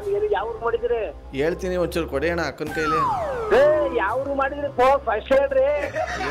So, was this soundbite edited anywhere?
no; 0 cuts

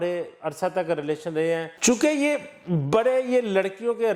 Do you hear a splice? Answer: yes; 1 cut; at 1.7 s

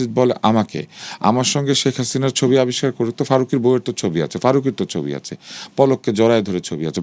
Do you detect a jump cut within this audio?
no; 0 cuts

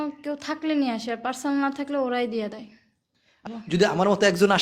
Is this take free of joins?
no; 1 cut; at 3.4 s

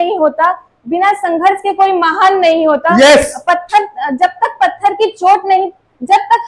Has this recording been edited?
no; 0 cuts

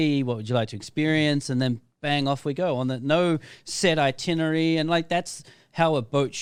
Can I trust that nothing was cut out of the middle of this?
yes; 0 cuts

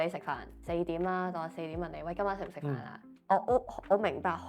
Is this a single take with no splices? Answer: yes; 0 cuts

